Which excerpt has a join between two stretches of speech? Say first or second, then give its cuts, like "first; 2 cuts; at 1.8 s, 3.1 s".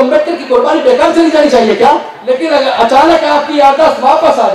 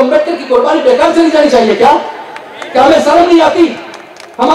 first; 1 cut; at 2.1 s